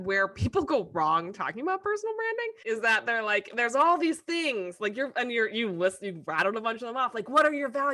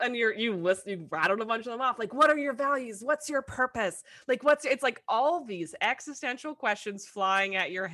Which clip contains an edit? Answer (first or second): first